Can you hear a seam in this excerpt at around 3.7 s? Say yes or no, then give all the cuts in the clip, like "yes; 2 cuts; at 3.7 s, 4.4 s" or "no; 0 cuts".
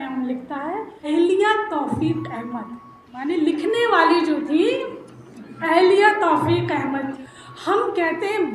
no; 2 cuts; at 1.1 s, 7.2 s